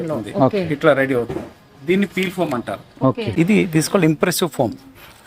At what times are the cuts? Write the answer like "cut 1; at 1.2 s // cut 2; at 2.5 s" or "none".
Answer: cut 1; at 3.2 s